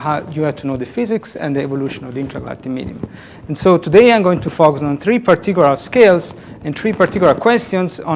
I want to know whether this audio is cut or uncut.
cut